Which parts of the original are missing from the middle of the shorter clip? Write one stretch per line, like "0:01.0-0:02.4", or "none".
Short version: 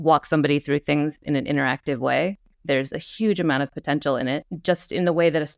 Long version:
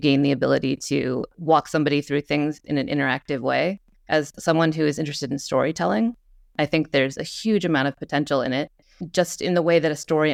0:04.0-0:06.9
0:08.8-0:09.0